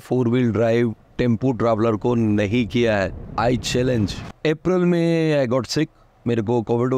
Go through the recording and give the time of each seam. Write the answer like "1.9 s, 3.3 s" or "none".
3.2 s, 4.2 s